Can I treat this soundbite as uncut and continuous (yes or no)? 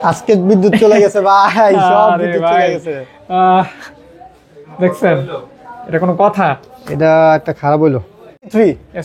yes